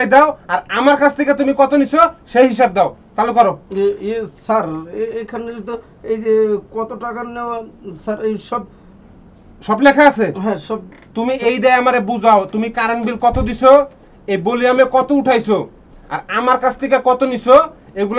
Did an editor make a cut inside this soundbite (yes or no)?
no